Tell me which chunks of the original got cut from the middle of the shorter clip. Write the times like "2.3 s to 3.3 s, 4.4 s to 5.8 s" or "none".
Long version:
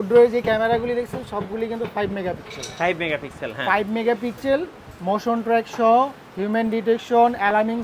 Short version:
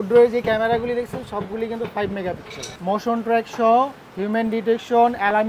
2.6 s to 4.8 s